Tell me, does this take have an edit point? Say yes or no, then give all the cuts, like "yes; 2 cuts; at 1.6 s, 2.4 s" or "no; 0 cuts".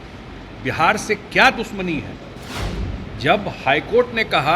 yes; 1 cut; at 2.5 s